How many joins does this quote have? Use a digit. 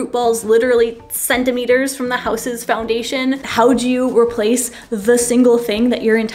1